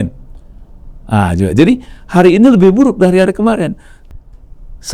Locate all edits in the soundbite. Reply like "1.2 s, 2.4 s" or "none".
3.9 s